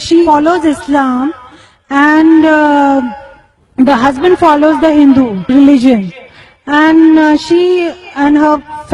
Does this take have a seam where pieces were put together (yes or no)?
yes